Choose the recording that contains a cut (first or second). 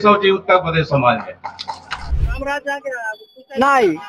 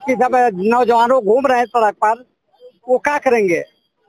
first